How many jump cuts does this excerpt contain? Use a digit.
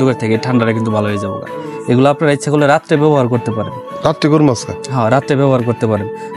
0